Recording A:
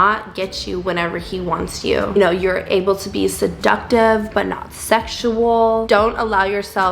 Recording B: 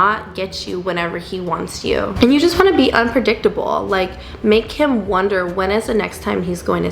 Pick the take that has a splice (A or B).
A